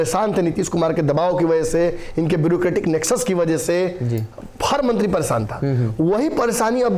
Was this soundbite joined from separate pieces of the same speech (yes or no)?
no